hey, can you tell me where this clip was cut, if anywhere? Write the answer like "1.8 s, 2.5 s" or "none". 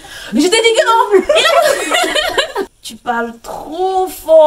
2.6 s